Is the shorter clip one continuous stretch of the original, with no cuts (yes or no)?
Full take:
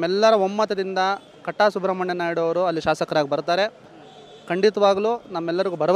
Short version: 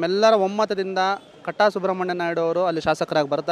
yes